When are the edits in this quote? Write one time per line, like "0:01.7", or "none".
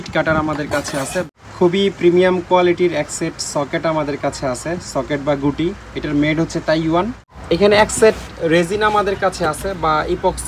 0:01.3
0:07.3